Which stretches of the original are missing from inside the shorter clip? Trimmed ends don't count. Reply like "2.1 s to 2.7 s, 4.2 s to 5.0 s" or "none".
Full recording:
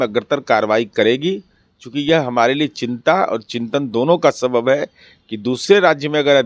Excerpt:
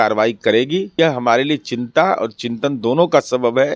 1.4 s to 2.0 s